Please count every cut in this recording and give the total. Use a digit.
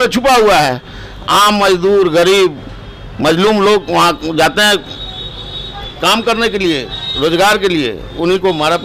0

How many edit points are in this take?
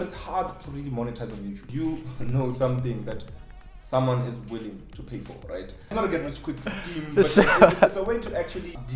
2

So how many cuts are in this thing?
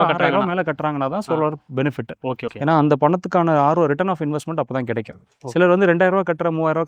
0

